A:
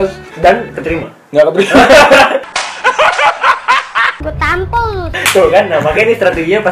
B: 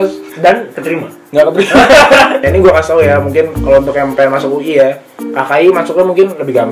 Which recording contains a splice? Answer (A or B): B